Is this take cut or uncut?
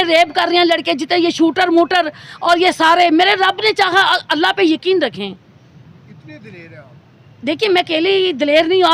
uncut